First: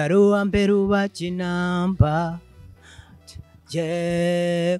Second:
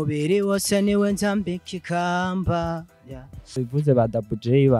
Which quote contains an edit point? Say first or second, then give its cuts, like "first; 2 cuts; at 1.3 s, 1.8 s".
second; 1 cut; at 3.7 s